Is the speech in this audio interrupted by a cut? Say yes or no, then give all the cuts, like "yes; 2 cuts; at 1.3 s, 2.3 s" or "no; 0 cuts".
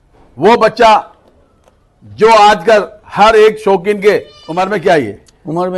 yes; 1 cut; at 4.4 s